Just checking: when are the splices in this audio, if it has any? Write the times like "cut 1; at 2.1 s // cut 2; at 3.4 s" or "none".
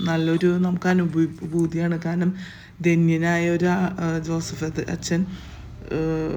none